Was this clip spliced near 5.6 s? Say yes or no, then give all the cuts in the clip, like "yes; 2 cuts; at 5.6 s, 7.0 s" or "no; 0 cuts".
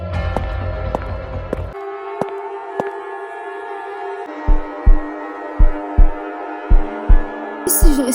no; 2 cuts; at 1.8 s, 4.3 s